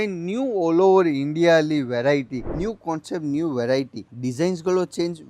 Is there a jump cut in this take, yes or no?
yes